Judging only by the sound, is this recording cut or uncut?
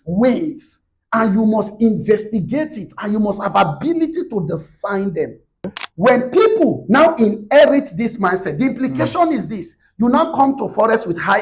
cut